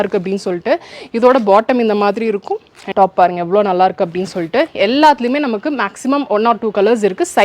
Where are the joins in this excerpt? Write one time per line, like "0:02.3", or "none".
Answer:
0:02.8

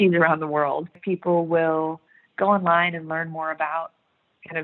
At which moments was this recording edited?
0:01.0

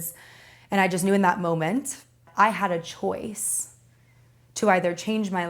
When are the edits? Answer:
0:02.3

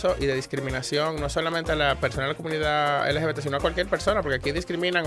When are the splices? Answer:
none

